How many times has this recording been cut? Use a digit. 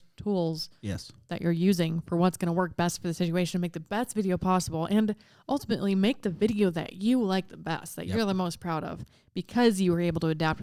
0